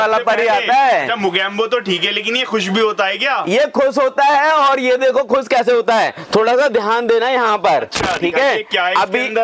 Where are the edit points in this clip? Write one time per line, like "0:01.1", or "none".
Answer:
none